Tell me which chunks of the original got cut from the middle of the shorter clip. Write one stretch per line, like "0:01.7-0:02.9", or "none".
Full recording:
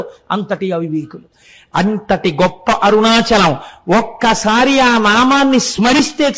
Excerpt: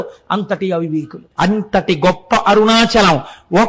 0:01.2-0:01.6

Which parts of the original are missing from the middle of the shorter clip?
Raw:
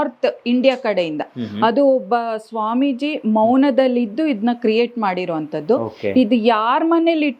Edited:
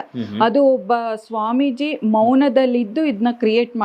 none

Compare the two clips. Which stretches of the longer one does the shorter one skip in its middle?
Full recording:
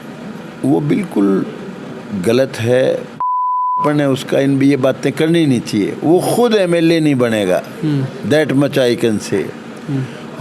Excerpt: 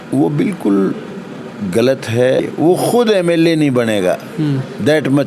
0:02.9-0:05.9

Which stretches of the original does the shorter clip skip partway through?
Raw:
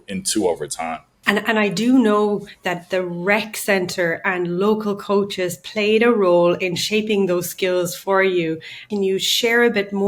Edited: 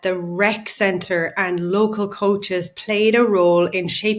none

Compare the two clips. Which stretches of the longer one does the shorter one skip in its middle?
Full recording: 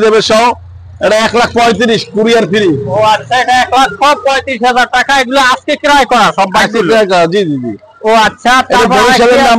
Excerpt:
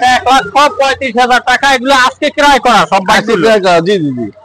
none

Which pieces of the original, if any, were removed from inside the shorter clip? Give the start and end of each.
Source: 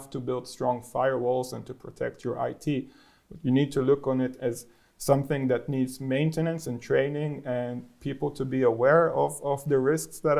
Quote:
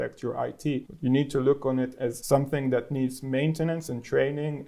0:02.9-0:03.3
0:04.6-0:05.0

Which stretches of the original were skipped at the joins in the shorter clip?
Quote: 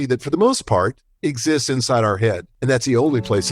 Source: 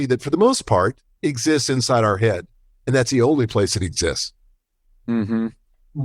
0:02.5-0:02.7

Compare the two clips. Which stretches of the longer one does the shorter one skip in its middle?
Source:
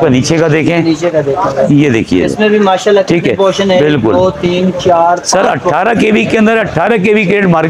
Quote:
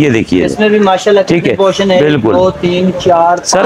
none

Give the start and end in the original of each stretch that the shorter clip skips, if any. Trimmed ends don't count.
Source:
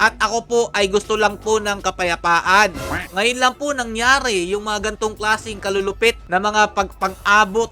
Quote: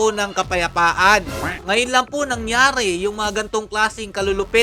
none

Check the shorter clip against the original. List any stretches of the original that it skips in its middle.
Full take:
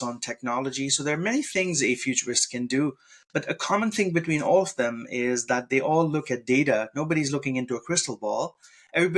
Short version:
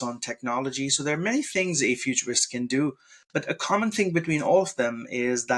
none

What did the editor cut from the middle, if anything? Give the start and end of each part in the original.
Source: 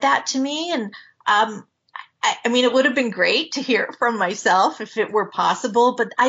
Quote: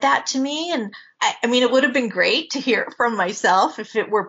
0:01.0-0:02.0

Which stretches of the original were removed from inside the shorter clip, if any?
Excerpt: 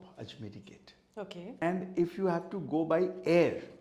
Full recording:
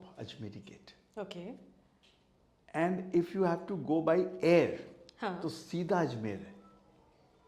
0:01.6-0:02.8

